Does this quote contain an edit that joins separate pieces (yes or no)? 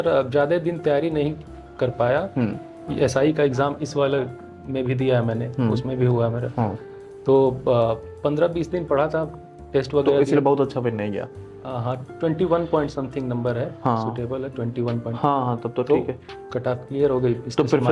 no